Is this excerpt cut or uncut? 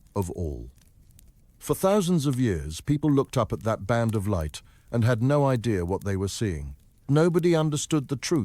cut